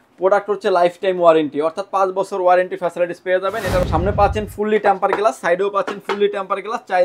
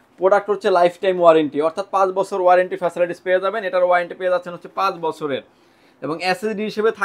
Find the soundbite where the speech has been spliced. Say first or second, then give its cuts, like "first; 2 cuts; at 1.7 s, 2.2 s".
first; 1 cut; at 3.8 s